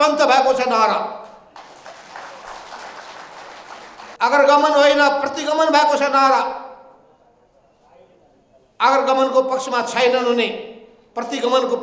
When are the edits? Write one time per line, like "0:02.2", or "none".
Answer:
0:04.2